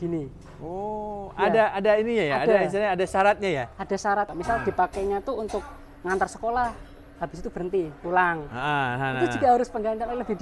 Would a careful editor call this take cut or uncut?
cut